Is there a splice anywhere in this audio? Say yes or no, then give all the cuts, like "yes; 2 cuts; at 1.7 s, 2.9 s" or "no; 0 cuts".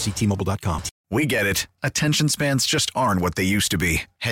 yes; 1 cut; at 0.9 s